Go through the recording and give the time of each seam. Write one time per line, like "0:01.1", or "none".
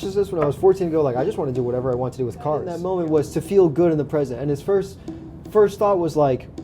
0:02.8